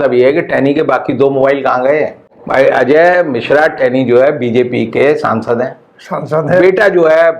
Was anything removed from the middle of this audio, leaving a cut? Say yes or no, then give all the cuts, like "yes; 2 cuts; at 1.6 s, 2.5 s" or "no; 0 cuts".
yes; 1 cut; at 2.2 s